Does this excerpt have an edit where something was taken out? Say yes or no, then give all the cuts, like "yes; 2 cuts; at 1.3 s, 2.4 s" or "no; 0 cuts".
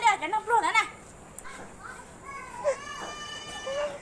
yes; 1 cut; at 1.6 s